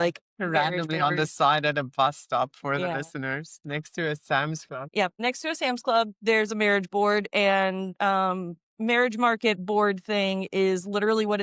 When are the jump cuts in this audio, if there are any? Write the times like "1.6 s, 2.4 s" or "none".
5.1 s

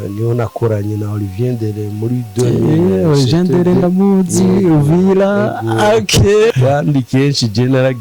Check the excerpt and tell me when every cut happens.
6.5 s

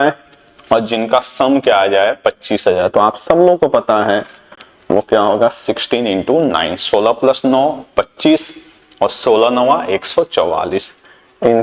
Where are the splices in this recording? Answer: none

